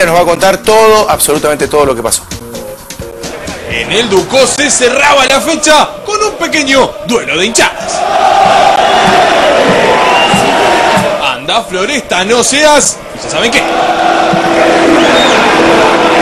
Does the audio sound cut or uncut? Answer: uncut